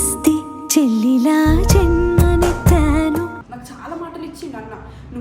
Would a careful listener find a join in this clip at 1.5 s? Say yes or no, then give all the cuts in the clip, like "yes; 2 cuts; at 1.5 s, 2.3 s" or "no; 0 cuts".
no; 1 cut; at 3.4 s